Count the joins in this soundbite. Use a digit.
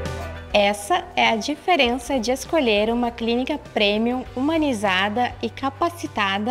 0